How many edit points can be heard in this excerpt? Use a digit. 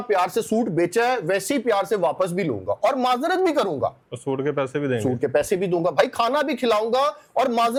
0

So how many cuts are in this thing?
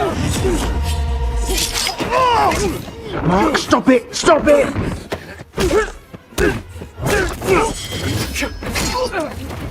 1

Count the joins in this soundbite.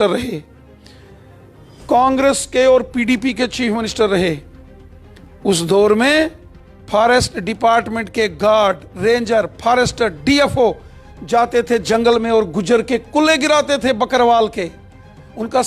0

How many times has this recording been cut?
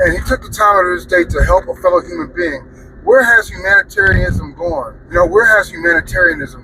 1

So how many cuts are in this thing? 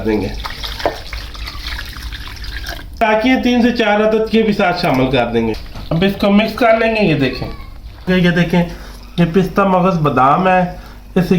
3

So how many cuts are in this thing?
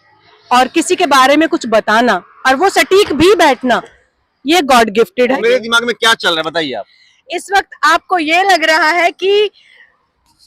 1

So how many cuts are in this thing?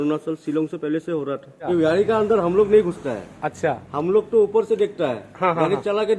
1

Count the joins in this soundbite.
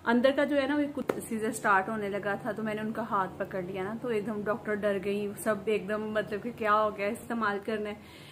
2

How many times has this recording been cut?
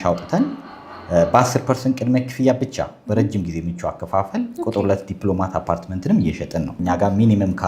1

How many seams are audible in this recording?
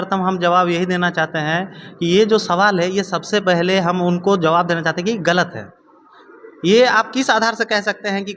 0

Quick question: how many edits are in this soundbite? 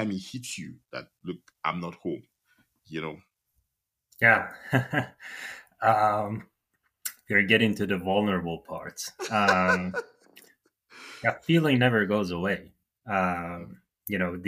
0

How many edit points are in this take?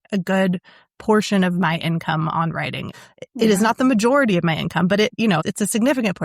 2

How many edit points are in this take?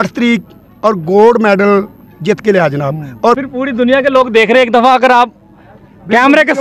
1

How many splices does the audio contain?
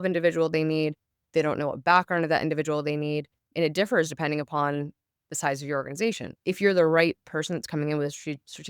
1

